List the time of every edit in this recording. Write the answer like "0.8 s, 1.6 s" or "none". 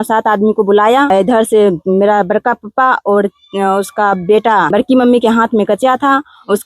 1.1 s, 4.7 s